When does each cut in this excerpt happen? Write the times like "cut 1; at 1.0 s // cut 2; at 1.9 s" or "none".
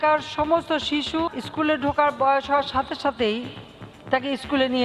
cut 1; at 1.4 s